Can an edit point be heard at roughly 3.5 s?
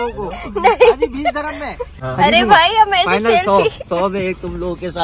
no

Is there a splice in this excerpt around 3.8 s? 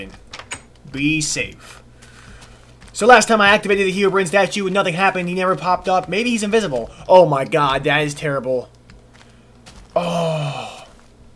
yes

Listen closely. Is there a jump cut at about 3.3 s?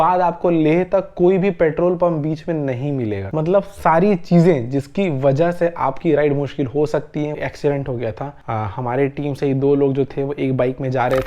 yes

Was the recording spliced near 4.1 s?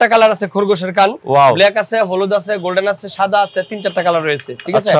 no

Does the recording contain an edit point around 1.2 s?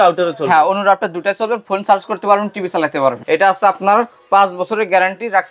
no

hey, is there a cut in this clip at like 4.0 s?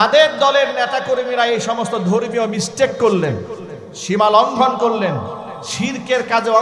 no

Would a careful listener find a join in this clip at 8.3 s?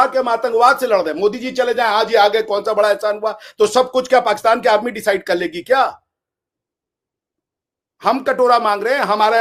no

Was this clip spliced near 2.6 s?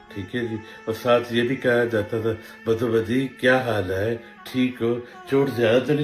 no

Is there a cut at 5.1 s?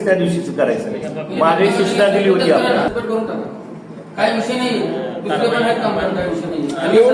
no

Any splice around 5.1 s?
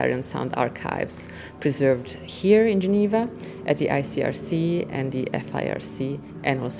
no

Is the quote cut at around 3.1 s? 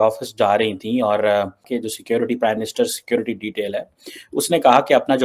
no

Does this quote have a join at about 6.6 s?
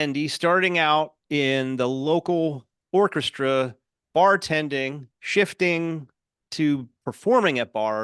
no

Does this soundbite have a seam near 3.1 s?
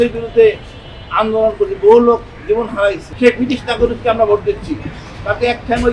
yes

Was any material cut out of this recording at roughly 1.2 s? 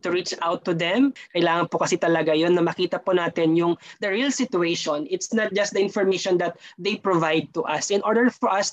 yes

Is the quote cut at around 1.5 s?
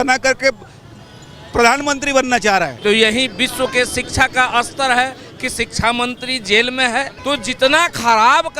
no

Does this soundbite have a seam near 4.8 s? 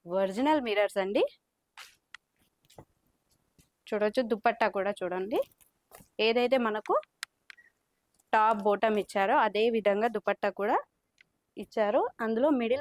no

